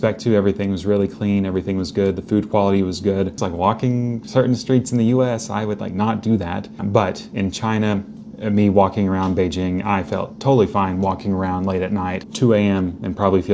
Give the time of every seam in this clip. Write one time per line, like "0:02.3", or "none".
0:03.4
0:06.7
0:12.2